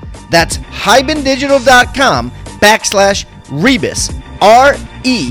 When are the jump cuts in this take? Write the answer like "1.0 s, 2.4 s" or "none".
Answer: none